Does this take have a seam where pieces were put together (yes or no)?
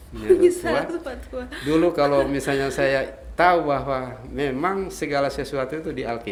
no